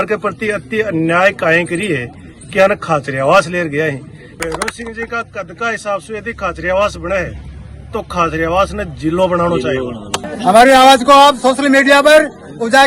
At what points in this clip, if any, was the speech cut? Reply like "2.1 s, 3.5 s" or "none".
4.3 s, 10.2 s